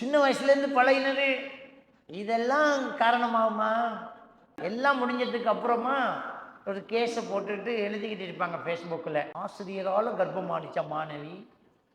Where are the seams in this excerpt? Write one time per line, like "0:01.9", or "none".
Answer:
0:04.6
0:09.3